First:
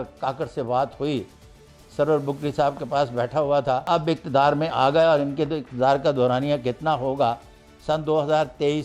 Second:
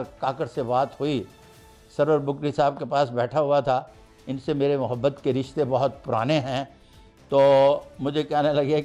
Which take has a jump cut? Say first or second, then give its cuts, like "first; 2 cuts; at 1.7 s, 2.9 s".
first; 1 cut; at 3.9 s